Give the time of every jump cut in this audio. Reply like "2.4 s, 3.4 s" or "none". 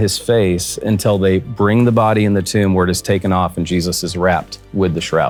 none

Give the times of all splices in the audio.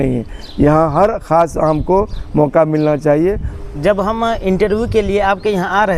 3.5 s

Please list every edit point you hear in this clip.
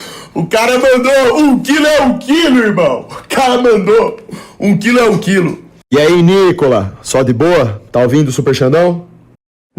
5.7 s

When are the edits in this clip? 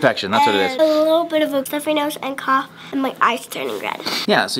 none

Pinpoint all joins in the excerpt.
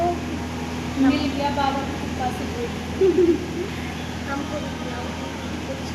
none

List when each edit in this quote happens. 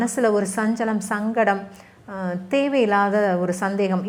none

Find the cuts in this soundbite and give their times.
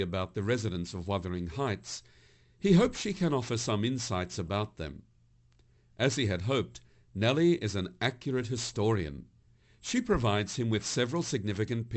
none

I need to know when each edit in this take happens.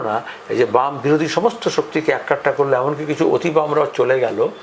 none

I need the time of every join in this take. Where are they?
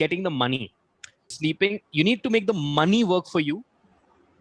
1.4 s

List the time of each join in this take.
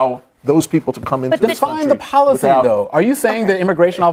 none

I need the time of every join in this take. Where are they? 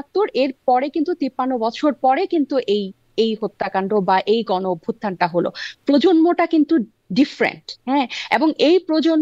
none

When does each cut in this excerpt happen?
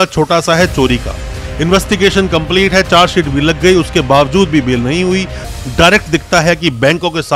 5.4 s

